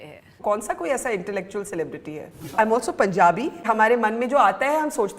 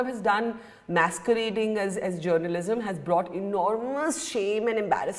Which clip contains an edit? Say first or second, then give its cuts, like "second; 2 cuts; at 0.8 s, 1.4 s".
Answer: first; 2 cuts; at 2.5 s, 3.7 s